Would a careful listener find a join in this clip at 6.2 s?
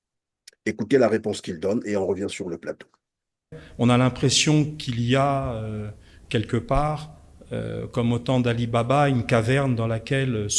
no; 1 cut; at 3.5 s

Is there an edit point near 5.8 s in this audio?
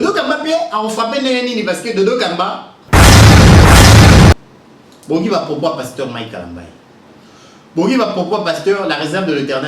no; 2 cuts; at 2.7 s, 4.4 s

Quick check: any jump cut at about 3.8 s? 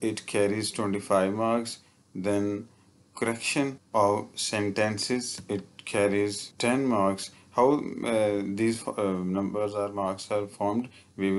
yes; 3 cuts; at 3.8 s, 5.4 s, 6.5 s

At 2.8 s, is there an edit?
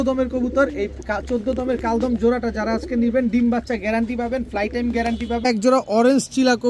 no; 1 cut; at 5.4 s

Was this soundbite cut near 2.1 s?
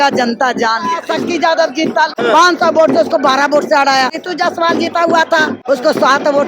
yes; 4 cuts; at 1.0 s, 2.1 s, 4.2 s, 5.5 s

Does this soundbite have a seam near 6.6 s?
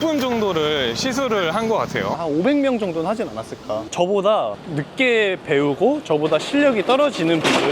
no; 1 cut; at 3.9 s

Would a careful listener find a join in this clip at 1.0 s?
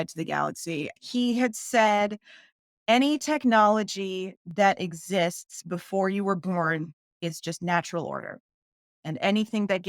yes; 1 cut; at 1.0 s

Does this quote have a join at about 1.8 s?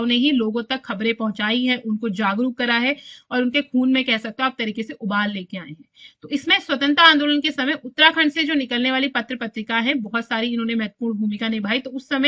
no; 0 cuts

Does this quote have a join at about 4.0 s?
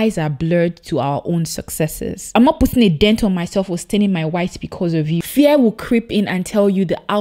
no; 2 cuts; at 2.2 s, 5.2 s

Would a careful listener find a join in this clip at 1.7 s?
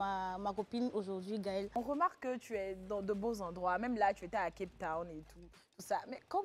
yes; 1 cut; at 1.7 s

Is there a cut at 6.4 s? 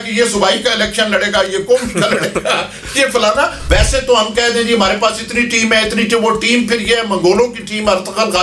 no; 1 cut; at 3.6 s

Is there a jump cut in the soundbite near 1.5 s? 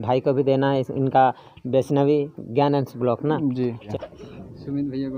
no; 1 cut; at 3.9 s

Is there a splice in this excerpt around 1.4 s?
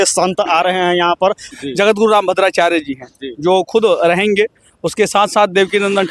yes; 1 cut; at 1.4 s

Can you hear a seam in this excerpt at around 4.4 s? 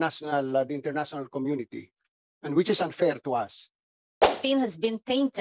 yes; 1 cut; at 4.4 s

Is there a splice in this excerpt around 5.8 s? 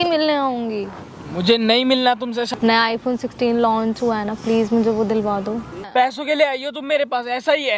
yes; 2 cuts; at 2.5 s, 5.8 s

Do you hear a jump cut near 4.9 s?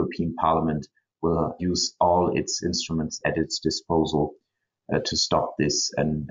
no; 2 cuts; at 1.6 s, 3.2 s

